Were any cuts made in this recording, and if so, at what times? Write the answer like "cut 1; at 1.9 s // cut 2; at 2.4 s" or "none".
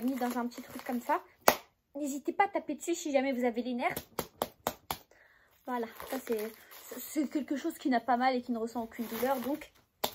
none